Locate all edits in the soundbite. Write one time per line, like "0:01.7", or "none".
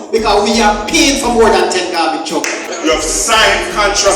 0:02.6